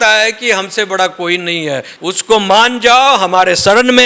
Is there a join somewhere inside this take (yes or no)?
yes